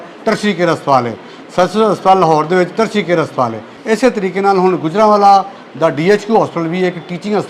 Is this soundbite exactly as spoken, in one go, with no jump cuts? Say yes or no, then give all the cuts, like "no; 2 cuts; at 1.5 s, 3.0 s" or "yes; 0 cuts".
no; 1 cut; at 3.7 s